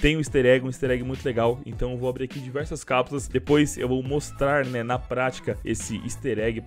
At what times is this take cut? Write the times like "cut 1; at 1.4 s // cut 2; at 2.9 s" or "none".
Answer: cut 1; at 5.6 s

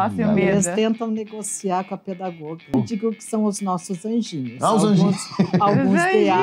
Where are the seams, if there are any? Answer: cut 1; at 2.7 s

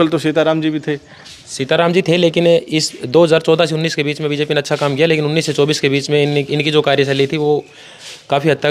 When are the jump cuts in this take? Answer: none

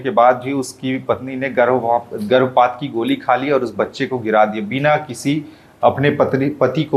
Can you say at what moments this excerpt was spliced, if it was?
none

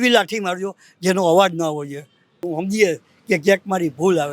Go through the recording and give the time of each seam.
cut 1; at 2.4 s

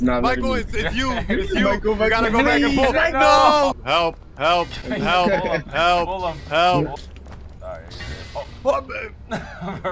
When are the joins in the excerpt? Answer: cut 1; at 3.8 s // cut 2; at 7.0 s

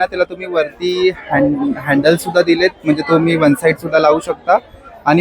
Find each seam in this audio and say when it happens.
none

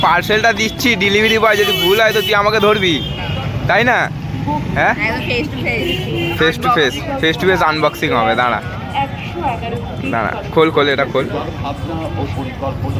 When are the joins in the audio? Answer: none

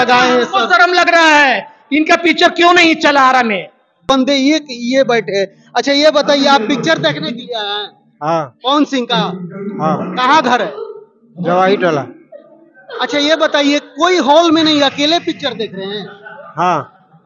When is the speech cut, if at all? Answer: cut 1; at 4.1 s

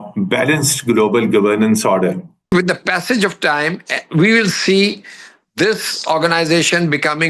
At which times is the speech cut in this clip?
cut 1; at 2.5 s

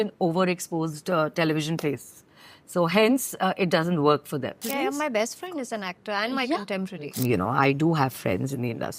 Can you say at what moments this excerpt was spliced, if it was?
cut 1; at 4.7 s // cut 2; at 7.1 s

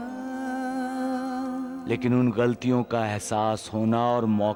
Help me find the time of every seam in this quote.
none

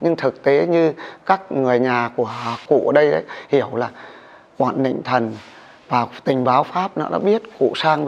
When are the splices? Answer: cut 1; at 2.6 s

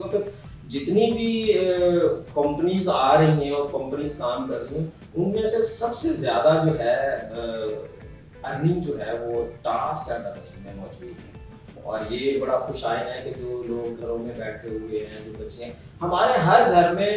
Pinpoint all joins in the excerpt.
none

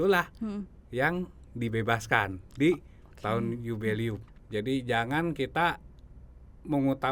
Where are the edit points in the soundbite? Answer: cut 1; at 4.3 s

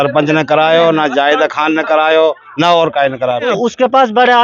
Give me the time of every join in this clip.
cut 1; at 3.5 s

